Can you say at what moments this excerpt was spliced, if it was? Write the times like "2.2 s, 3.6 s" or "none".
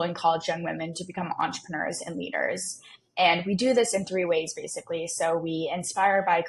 none